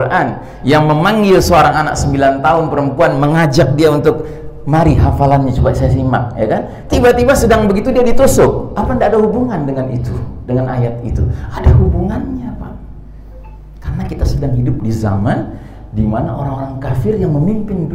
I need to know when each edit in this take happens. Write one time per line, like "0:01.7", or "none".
none

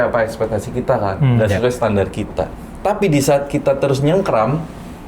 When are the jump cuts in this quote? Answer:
none

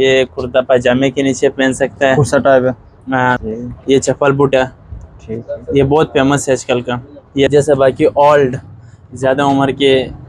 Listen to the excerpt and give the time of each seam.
0:03.5
0:07.5

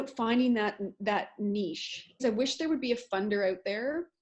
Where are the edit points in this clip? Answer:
0:02.2

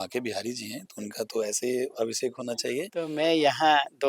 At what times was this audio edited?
0:03.1

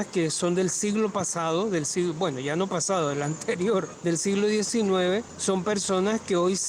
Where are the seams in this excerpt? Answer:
0:03.9
0:05.3

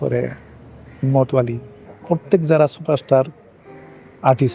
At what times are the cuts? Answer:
0:01.9

